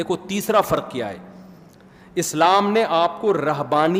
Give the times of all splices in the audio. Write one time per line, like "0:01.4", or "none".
none